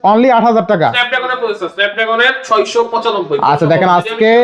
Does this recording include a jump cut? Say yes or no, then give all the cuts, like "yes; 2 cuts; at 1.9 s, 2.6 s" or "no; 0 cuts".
no; 0 cuts